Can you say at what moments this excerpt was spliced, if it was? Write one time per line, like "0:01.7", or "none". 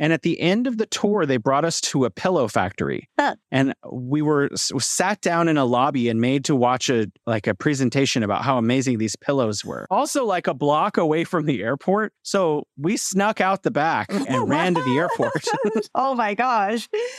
none